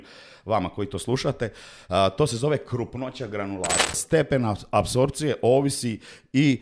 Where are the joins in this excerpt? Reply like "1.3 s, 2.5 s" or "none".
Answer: 4.0 s